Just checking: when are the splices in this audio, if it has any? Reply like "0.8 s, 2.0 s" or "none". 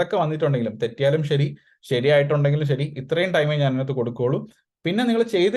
none

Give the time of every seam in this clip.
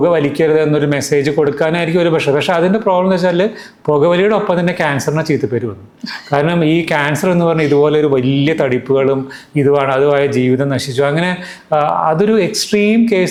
none

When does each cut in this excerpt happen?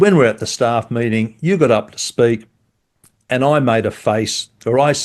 none

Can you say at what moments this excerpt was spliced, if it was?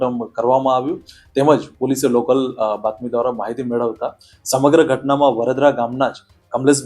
none

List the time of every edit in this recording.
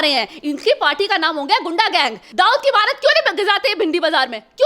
2.2 s

